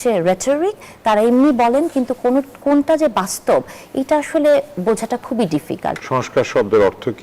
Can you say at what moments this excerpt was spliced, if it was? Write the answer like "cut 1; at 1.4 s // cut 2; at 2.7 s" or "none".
cut 1; at 6.0 s